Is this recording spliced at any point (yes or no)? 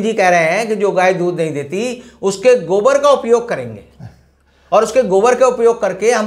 no